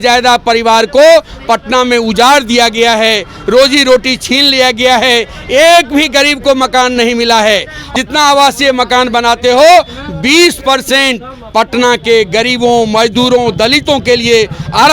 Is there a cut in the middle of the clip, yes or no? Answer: yes